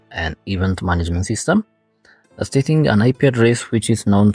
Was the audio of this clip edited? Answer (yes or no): no